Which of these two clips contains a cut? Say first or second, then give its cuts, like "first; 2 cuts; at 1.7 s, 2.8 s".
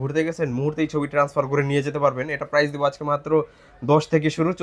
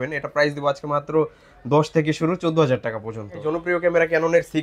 second; 1 cut; at 3.4 s